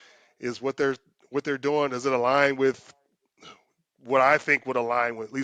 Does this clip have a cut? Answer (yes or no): no